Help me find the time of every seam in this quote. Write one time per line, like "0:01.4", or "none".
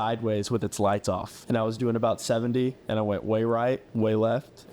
0:01.3
0:03.9